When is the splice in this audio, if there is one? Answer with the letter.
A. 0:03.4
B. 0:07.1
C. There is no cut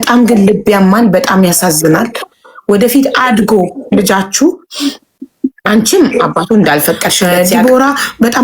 B